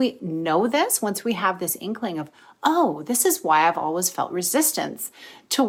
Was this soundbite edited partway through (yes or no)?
no